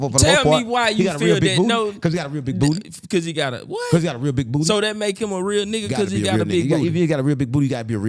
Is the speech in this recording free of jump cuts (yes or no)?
yes